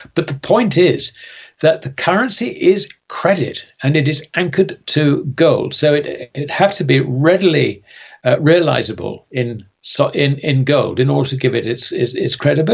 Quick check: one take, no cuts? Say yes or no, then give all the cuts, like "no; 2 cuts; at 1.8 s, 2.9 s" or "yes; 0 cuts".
yes; 0 cuts